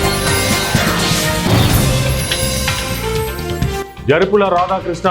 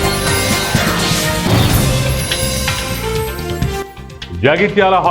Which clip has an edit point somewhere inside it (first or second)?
first